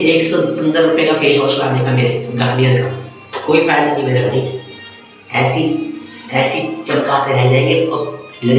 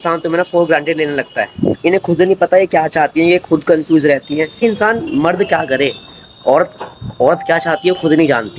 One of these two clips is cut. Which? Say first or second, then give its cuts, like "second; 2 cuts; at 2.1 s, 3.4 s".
second; 2 cuts; at 1.8 s, 4.6 s